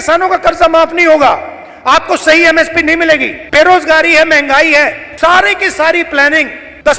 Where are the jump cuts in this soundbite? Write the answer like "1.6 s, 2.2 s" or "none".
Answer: none